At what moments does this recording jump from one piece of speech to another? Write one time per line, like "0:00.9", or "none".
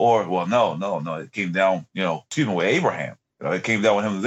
0:02.3